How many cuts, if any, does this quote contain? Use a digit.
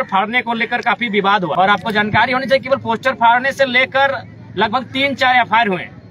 1